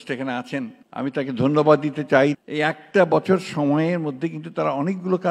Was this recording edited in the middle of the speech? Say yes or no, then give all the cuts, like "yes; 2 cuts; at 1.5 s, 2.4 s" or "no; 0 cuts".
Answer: yes; 1 cut; at 2.4 s